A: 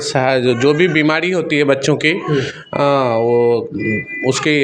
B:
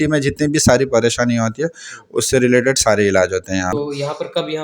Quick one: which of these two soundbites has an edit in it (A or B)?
B